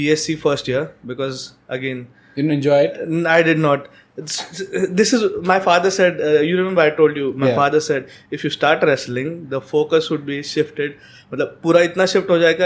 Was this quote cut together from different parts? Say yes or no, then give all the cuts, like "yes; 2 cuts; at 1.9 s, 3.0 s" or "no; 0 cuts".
no; 0 cuts